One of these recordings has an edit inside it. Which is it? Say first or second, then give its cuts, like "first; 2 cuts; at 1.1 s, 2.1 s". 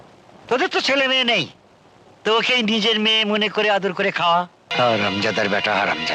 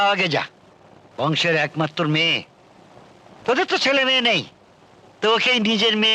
first; 1 cut; at 4.6 s